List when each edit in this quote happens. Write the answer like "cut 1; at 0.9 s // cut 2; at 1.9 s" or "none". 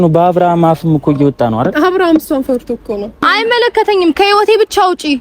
cut 1; at 3.3 s

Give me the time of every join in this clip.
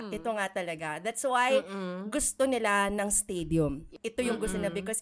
cut 1; at 4.0 s

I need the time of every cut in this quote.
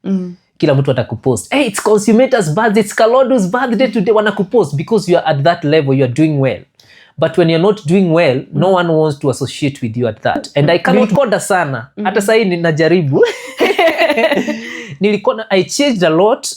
cut 1; at 11.0 s

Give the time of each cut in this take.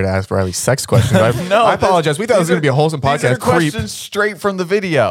cut 1; at 3.4 s

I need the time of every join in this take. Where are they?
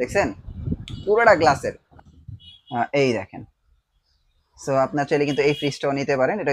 cut 1; at 1.8 s

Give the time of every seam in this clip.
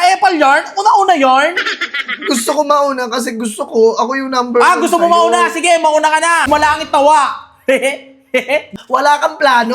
cut 1; at 6.5 s // cut 2; at 8.7 s

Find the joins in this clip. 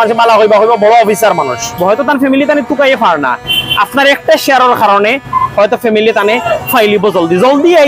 cut 1; at 1.7 s

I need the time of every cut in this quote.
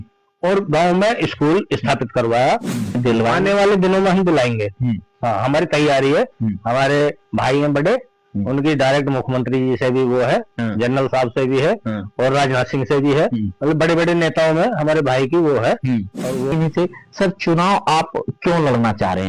cut 1; at 3.0 s // cut 2; at 16.5 s

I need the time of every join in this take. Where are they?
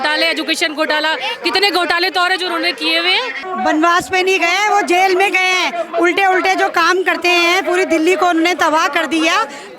cut 1; at 3.4 s

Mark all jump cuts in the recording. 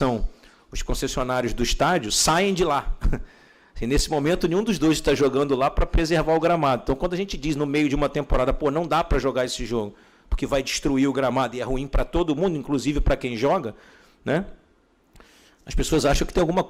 none

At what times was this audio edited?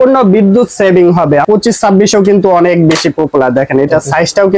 cut 1; at 1.4 s

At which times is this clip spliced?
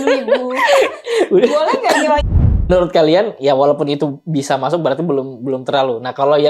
cut 1; at 2.3 s

